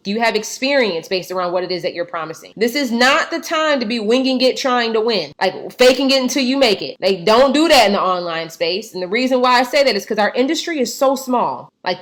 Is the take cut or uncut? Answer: uncut